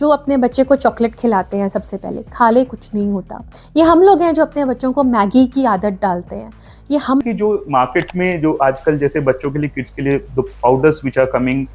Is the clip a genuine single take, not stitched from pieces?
no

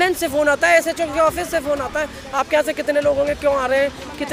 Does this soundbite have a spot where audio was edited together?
no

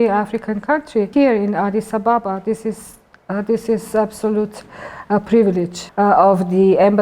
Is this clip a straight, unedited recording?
no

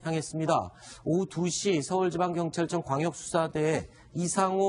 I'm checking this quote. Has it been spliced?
yes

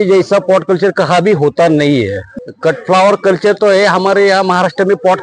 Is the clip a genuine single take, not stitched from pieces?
no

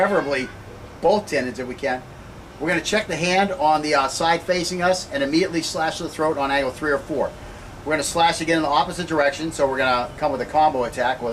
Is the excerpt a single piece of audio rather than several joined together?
no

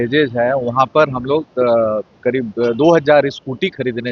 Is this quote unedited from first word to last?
yes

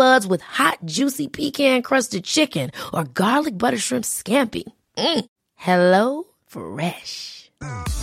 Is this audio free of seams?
yes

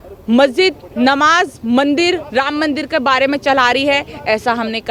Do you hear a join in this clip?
no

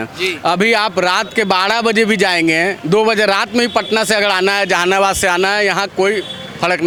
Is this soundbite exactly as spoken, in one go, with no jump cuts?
yes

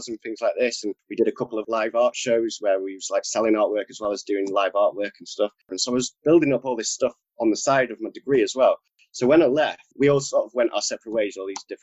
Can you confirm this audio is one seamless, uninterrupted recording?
no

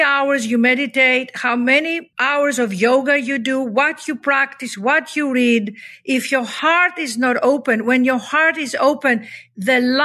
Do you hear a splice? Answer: yes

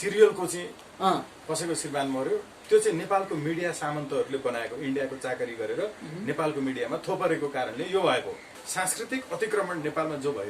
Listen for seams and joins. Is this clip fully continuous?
no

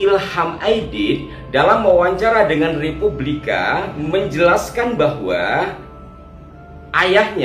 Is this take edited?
yes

